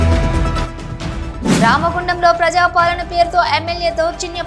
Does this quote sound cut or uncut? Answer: cut